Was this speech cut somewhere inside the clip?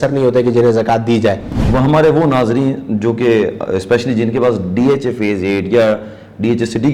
yes; 1 cut; at 1.5 s

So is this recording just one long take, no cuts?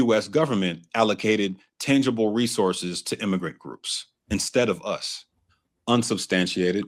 yes; 0 cuts

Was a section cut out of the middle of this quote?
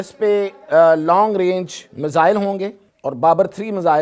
yes; 1 cut; at 2.9 s

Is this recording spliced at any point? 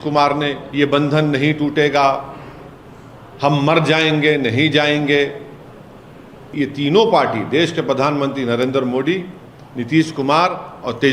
yes; 1 cut; at 6.5 s

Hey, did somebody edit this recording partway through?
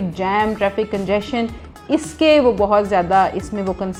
no; 0 cuts

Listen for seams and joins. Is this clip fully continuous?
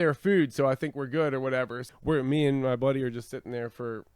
no; 1 cut; at 1.9 s

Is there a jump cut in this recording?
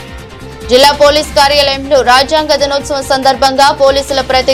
no; 0 cuts

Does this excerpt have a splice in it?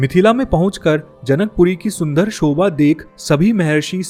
no; 0 cuts

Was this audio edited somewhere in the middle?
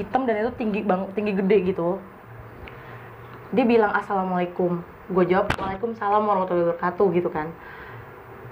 no; 0 cuts

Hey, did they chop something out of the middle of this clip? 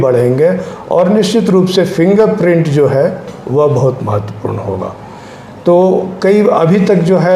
no; 0 cuts

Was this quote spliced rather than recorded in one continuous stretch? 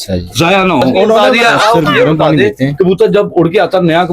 yes; 1 cut; at 0.9 s

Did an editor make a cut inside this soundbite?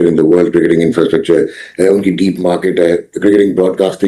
no; 0 cuts

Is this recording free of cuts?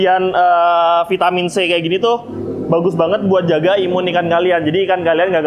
yes; 0 cuts

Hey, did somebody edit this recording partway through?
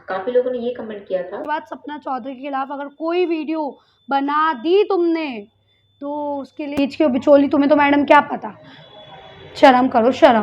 yes; 2 cuts; at 1.4 s, 6.8 s

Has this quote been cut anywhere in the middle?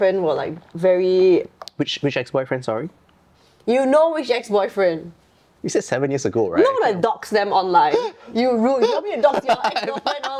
no; 0 cuts

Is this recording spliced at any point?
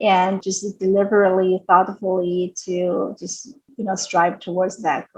no; 0 cuts

